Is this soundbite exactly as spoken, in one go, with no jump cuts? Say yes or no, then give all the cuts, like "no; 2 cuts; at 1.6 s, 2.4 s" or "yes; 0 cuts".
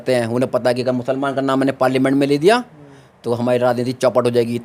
yes; 0 cuts